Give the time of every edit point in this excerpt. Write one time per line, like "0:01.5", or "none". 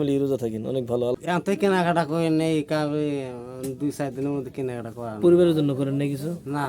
0:01.1